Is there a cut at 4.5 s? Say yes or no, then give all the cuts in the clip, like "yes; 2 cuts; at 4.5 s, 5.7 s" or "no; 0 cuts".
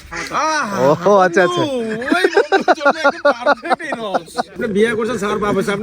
yes; 1 cut; at 4.5 s